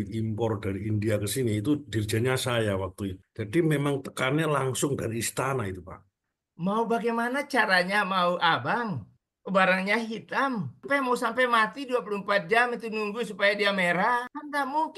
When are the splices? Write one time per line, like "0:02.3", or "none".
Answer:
0:03.2
0:06.1
0:10.8